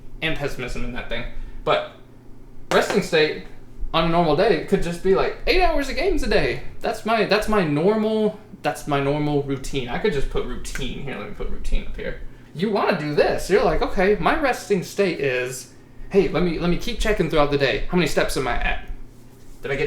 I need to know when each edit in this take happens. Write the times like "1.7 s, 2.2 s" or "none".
12.4 s